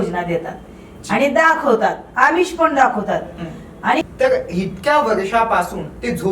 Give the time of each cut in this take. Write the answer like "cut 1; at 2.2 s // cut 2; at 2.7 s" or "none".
cut 1; at 4.0 s